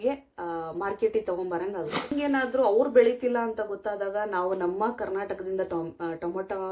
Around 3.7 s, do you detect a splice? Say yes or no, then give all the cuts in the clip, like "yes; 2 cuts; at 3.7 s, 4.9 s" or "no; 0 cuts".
no; 1 cut; at 2.1 s